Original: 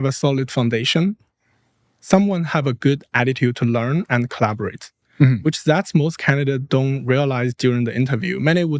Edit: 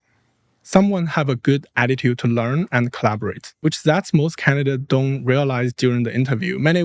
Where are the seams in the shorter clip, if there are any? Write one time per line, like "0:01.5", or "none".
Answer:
0:03.6